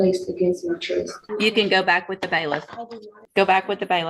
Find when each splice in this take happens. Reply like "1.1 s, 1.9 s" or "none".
1.2 s, 3.2 s